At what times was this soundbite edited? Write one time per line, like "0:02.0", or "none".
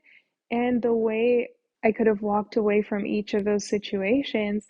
0:01.6